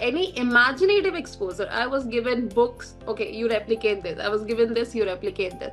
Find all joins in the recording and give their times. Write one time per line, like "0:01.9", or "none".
none